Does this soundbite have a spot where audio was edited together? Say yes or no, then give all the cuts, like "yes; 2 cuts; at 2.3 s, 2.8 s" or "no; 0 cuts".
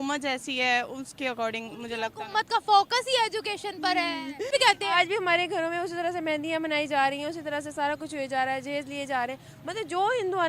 yes; 1 cut; at 4.5 s